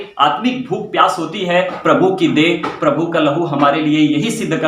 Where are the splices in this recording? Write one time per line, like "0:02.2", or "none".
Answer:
0:01.7